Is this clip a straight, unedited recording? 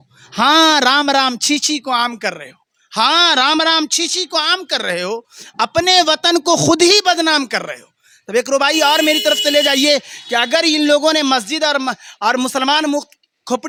yes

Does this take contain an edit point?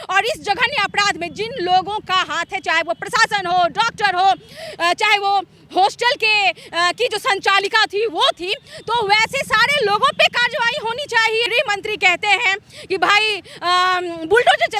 yes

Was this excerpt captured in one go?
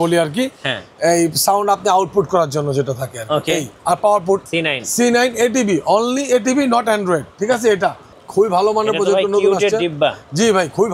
no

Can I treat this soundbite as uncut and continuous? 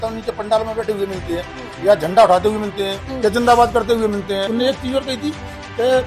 no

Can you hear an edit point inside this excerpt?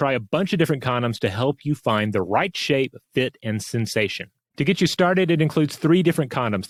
no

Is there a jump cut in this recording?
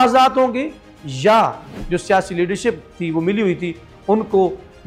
yes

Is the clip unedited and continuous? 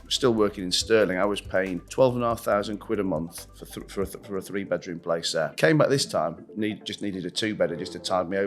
no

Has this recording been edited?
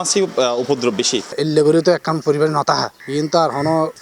yes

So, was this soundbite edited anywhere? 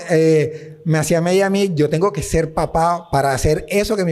no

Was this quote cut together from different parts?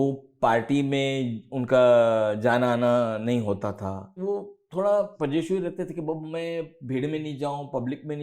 yes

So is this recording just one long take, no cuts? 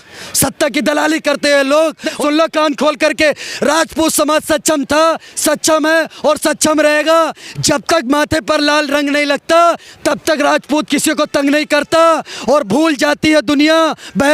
no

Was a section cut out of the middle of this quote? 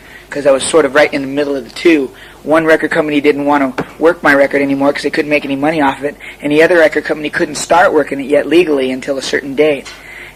no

